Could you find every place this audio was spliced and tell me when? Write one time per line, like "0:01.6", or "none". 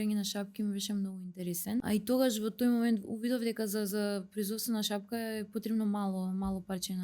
0:01.8